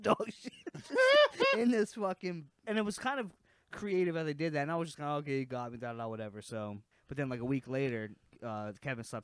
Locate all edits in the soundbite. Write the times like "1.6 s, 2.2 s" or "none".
2.6 s, 6.9 s